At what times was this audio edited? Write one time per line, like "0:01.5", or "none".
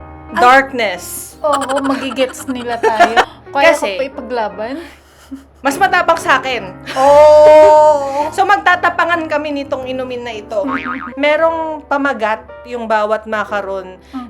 0:03.3
0:11.1